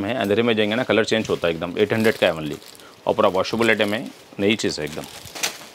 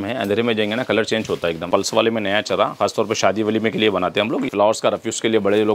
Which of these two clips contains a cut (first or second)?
second